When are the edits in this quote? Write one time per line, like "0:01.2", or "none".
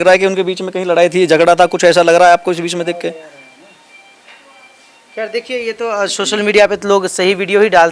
none